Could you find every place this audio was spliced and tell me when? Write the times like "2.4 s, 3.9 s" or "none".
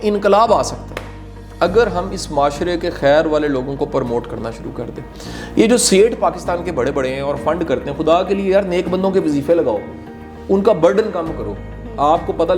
none

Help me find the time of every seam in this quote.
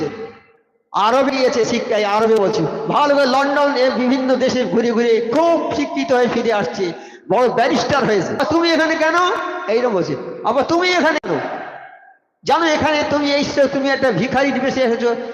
8.4 s

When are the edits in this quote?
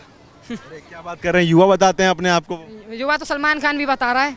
none

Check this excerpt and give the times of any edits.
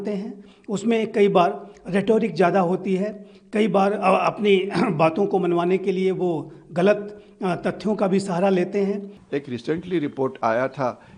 9.2 s

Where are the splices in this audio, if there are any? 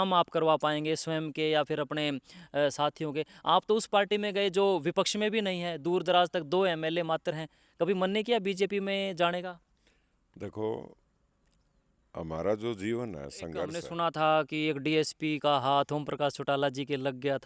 13.8 s

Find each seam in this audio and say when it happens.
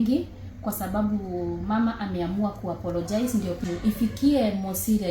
3.6 s

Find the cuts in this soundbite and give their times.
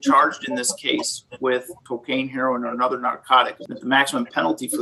1.8 s, 3.6 s

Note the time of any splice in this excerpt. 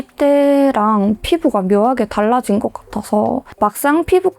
3.5 s

